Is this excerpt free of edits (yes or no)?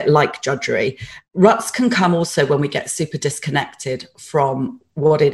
yes